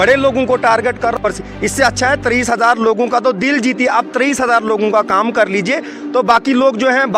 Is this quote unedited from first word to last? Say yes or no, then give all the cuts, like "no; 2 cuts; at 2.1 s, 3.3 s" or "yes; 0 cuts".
no; 1 cut; at 1.2 s